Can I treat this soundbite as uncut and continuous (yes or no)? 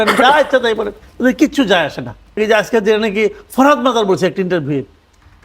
no